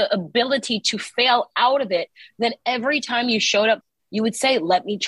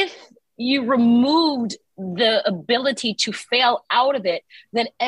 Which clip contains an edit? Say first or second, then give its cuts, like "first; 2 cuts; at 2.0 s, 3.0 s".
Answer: first; 1 cut; at 3.9 s